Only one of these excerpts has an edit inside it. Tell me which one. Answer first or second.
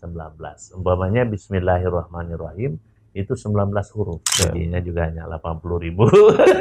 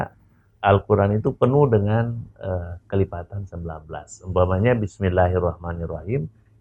first